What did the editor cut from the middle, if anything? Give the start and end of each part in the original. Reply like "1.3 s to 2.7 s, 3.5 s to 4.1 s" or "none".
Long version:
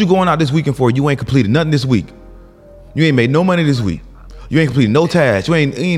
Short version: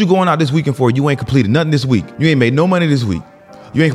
2.1 s to 2.9 s